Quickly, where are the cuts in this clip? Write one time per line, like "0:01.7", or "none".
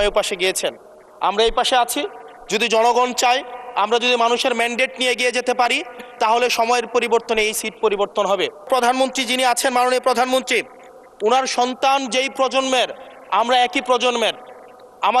0:08.7